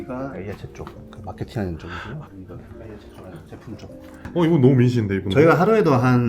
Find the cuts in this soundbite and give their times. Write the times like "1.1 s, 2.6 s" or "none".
4.2 s